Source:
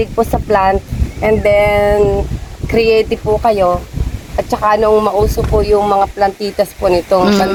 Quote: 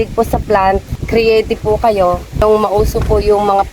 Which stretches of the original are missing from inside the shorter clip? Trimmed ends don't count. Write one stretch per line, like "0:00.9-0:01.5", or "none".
0:00.9-0:02.5
0:04.0-0:04.8

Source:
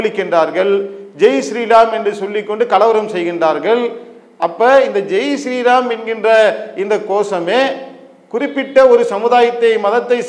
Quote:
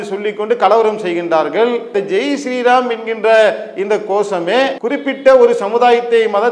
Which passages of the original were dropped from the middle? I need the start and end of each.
0:04.0-0:04.9
0:07.8-0:08.3

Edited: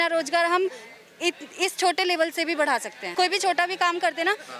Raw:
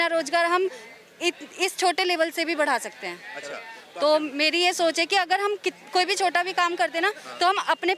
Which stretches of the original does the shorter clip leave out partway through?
0:03.0-0:05.8

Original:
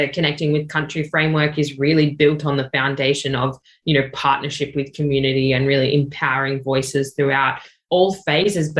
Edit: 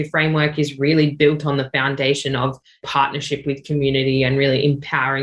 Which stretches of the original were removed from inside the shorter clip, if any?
0:03.8-0:04.1

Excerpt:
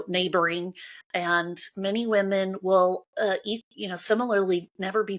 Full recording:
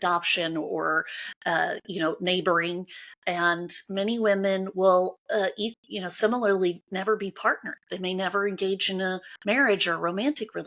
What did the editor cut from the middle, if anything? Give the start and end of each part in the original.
none

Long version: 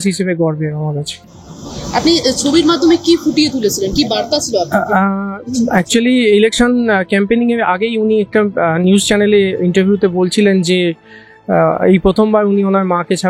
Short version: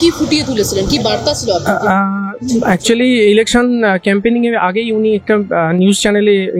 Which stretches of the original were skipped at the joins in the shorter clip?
none

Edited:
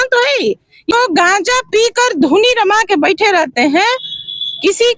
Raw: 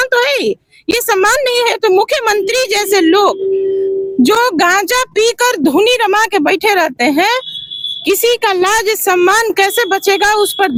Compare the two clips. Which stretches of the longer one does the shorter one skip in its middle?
0:00.9-0:04.4

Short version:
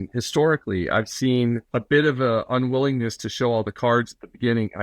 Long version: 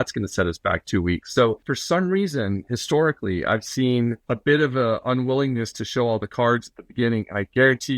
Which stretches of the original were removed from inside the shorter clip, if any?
none

